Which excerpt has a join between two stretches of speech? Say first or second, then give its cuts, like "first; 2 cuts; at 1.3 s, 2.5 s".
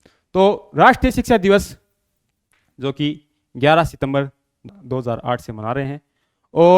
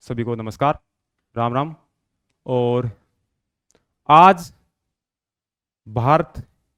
first; 1 cut; at 4.6 s